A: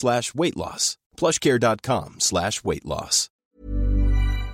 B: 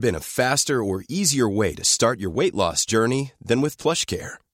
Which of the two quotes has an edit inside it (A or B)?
A